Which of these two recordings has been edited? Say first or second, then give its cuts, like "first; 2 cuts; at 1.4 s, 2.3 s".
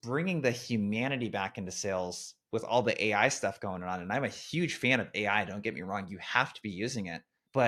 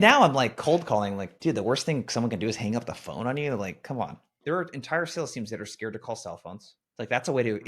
second; 1 cut; at 4.3 s